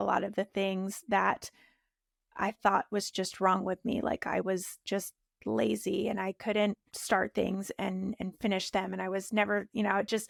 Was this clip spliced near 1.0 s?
no; 0 cuts

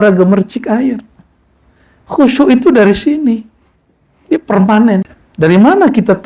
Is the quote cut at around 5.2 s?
yes; 1 cut; at 5.2 s

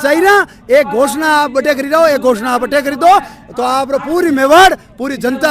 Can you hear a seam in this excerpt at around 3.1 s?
no; 0 cuts

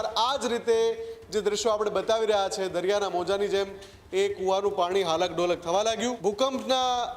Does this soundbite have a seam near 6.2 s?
yes; 1 cut; at 6.2 s

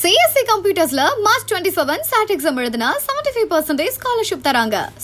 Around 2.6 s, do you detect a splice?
no; 0 cuts

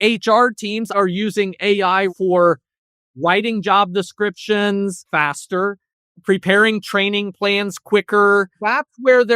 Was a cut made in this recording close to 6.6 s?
no; 4 cuts; at 0.9 s, 2.1 s, 5.0 s, 8.6 s

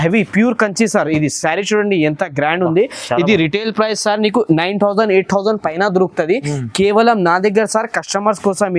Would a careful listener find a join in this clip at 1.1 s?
no; 0 cuts

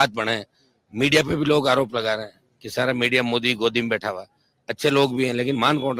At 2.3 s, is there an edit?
no; 0 cuts

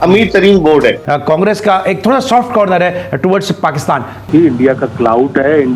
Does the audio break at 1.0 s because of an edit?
yes; 2 cuts; at 1.0 s, 4.2 s

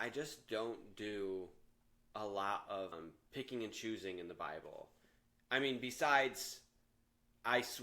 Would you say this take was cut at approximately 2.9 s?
yes; 1 cut; at 2.9 s

